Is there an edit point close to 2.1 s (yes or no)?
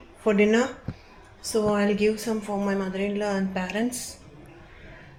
no